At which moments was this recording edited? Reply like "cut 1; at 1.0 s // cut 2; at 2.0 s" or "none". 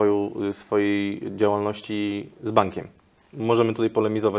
none